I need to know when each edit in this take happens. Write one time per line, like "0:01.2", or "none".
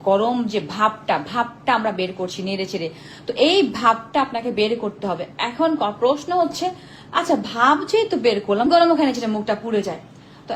0:08.6